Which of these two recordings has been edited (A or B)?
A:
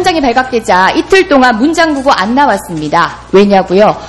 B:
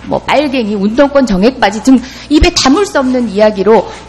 A